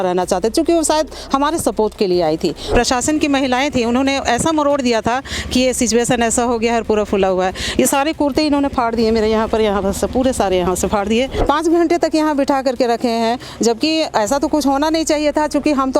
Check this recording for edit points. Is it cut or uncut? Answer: cut